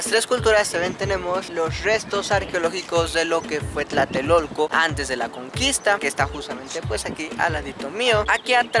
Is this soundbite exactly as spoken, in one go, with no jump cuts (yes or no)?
yes